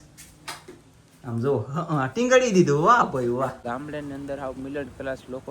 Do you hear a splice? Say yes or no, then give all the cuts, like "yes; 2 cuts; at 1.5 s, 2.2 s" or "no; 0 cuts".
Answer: yes; 1 cut; at 3.6 s